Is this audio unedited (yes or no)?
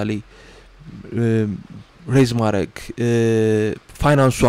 yes